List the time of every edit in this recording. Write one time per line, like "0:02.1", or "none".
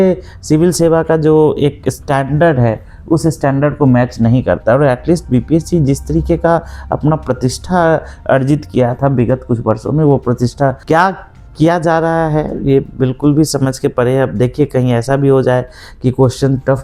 0:10.8